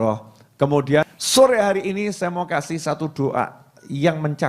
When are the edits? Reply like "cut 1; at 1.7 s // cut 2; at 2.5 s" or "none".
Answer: cut 1; at 1.0 s